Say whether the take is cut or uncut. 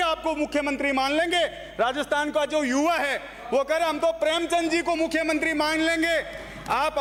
uncut